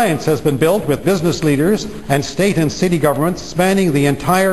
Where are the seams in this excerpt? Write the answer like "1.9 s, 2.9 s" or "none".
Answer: none